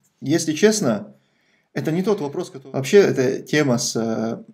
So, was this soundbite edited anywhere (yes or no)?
yes